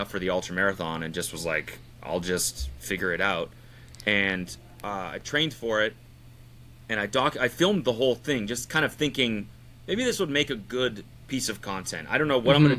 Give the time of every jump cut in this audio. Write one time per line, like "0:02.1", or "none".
none